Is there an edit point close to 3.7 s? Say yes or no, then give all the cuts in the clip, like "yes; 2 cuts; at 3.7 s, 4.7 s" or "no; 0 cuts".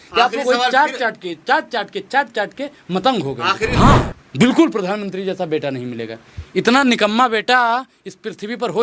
yes; 1 cut; at 3.7 s